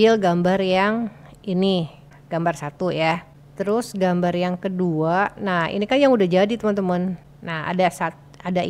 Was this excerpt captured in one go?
yes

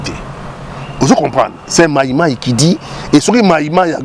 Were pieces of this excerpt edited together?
no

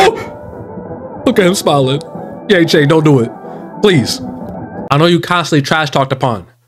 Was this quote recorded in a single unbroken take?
no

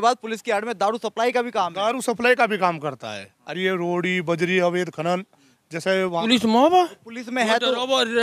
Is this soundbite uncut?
no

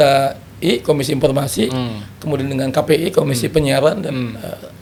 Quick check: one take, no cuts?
yes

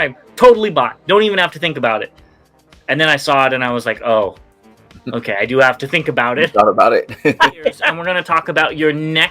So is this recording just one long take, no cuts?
no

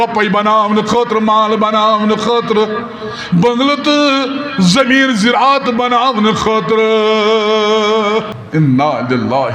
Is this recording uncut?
no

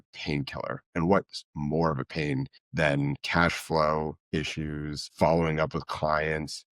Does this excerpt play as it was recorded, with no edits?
no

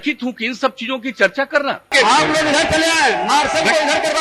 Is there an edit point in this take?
yes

